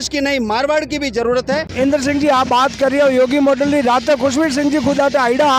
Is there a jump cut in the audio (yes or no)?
yes